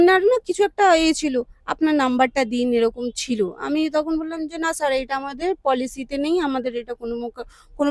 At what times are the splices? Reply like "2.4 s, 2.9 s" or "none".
none